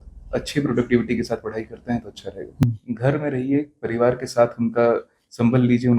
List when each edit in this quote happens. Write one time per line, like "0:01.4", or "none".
0:02.6